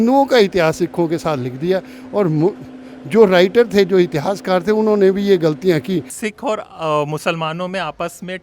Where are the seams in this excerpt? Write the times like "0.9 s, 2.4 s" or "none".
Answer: 6.1 s